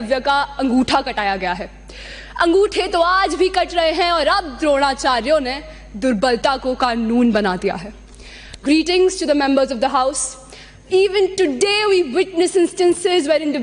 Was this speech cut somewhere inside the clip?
no; 0 cuts

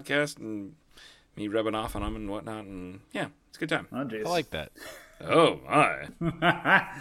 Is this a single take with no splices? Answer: no; 1 cut; at 6.1 s

